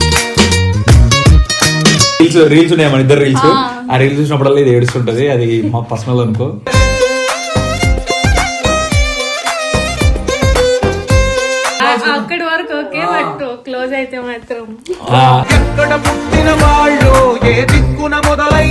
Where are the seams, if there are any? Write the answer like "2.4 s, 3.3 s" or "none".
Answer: 2.2 s, 11.8 s